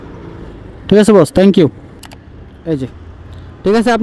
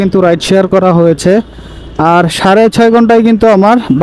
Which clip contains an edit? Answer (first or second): first